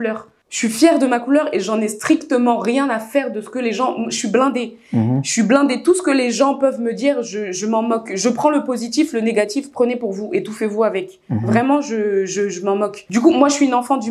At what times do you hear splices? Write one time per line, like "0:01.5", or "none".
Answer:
none